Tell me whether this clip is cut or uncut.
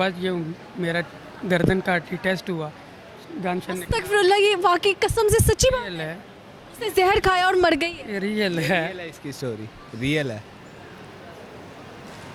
uncut